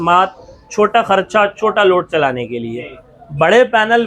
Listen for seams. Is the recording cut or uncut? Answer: uncut